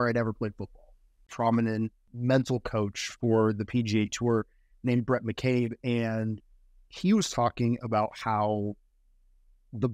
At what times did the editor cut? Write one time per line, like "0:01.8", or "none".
0:01.3
0:02.1